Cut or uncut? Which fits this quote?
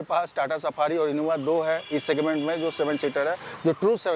uncut